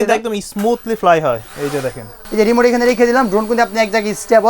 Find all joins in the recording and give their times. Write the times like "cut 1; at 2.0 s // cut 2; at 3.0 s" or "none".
cut 1; at 2.2 s